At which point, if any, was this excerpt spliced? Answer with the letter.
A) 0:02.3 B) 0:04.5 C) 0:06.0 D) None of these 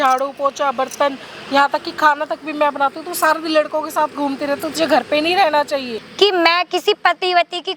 C